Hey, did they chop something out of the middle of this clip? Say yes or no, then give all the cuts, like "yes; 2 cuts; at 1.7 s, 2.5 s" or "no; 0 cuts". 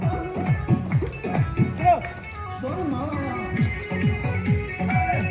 no; 0 cuts